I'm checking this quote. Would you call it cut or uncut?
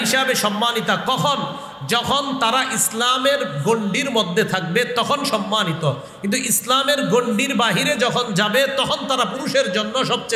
uncut